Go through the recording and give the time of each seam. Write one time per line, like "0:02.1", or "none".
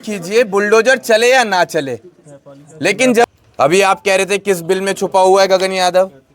0:03.2